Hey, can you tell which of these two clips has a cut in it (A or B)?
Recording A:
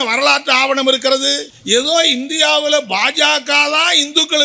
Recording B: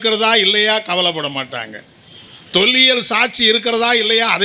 A